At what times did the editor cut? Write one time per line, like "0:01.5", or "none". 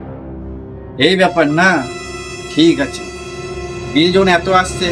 0:01.0